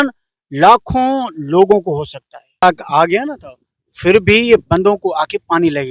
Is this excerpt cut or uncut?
cut